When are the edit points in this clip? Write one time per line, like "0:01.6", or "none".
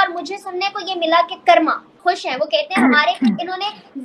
0:02.0